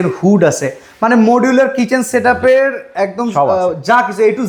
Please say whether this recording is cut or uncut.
uncut